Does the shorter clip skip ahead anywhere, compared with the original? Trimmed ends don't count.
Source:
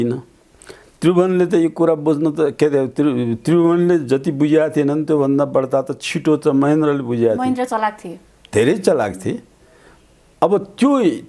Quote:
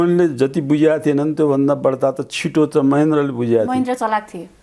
no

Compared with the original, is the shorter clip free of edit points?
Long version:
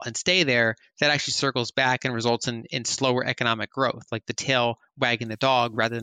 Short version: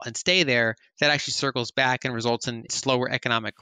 no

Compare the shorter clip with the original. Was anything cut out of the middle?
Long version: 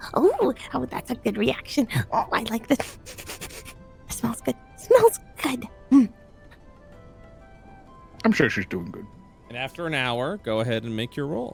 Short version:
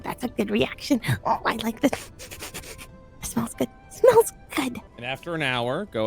yes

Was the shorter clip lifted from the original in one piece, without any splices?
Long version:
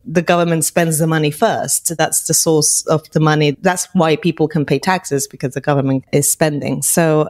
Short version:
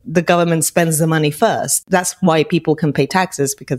no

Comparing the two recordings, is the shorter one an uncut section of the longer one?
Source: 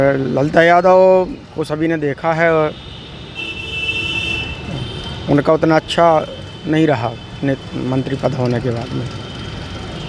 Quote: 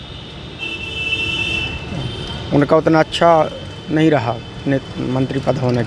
yes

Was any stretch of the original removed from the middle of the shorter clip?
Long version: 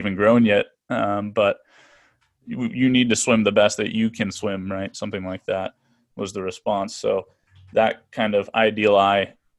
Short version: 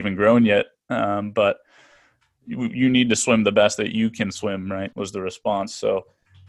yes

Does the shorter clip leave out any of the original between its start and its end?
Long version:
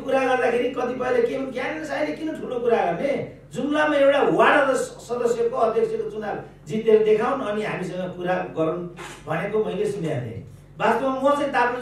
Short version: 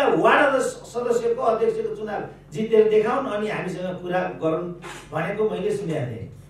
no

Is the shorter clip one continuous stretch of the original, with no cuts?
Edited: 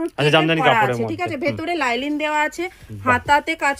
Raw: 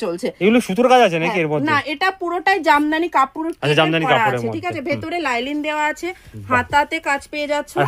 yes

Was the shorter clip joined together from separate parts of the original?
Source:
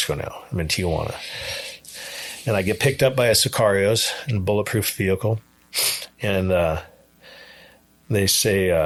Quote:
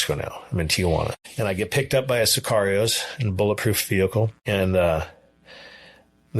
yes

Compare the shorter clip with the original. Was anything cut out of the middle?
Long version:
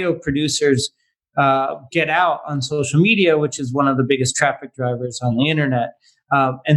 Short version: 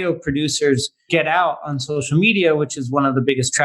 yes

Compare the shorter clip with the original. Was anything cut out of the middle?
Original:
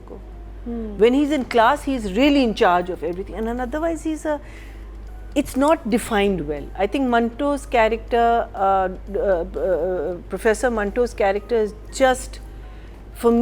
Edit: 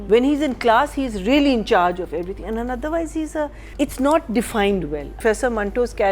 yes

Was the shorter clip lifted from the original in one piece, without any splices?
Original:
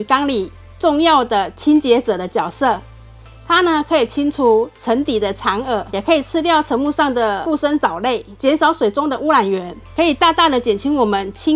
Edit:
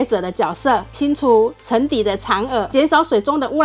no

